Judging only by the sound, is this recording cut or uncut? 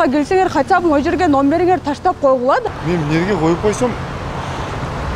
cut